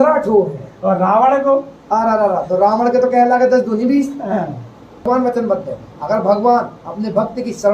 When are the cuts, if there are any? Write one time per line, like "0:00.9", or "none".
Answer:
0:05.1